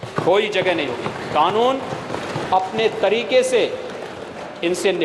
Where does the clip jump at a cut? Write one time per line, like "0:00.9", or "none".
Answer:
none